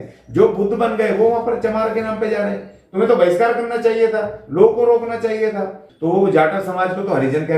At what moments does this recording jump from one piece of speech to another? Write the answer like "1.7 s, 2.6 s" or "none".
5.8 s